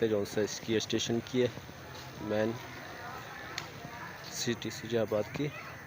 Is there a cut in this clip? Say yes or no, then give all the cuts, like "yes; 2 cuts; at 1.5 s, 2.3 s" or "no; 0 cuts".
no; 0 cuts